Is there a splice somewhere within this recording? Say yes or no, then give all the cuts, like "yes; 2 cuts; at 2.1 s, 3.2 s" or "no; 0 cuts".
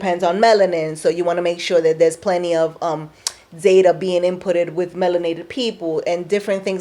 no; 0 cuts